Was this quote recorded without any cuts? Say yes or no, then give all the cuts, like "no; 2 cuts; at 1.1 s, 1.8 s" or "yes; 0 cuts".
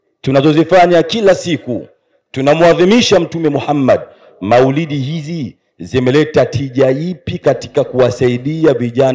yes; 0 cuts